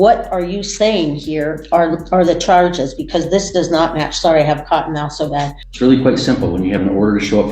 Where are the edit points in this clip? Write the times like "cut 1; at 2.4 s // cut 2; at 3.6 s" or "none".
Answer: cut 1; at 5.6 s